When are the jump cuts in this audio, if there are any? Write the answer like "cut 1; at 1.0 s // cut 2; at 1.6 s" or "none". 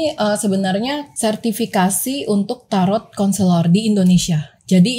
cut 1; at 1.1 s